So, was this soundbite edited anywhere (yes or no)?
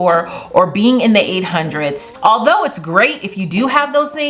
yes